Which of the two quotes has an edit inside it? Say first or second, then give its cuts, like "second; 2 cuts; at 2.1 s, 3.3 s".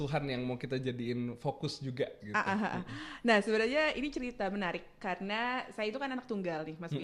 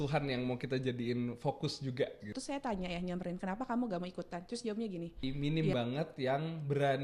second; 2 cuts; at 2.3 s, 5.2 s